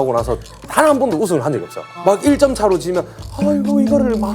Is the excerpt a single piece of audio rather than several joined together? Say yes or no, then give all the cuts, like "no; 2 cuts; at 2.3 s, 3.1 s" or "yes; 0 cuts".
no; 1 cut; at 1.9 s